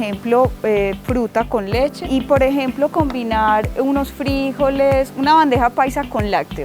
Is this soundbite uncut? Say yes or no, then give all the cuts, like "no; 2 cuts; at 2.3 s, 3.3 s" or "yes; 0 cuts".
no; 1 cut; at 2.0 s